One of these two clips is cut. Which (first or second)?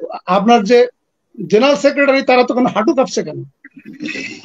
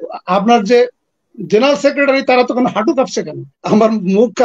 second